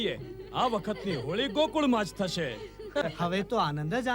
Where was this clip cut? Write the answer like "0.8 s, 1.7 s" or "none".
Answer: 3.0 s